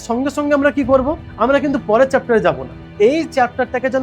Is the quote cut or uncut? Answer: cut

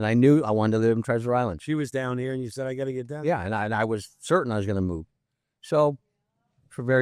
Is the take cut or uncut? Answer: uncut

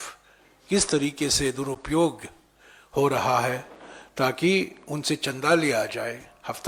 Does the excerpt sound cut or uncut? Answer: uncut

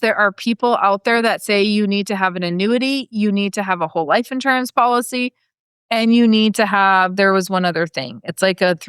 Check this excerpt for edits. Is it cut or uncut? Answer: uncut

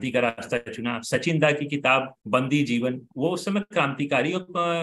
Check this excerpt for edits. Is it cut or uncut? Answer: cut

